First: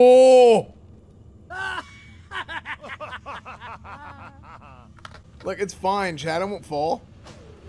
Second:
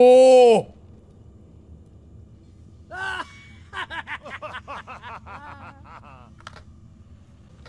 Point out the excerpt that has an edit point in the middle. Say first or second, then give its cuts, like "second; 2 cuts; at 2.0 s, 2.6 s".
first; 2 cuts; at 1.3 s, 5.3 s